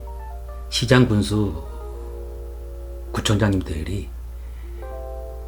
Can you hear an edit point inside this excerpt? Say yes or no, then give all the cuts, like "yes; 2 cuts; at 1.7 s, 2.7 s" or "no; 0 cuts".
no; 0 cuts